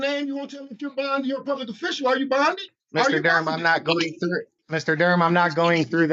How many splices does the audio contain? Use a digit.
2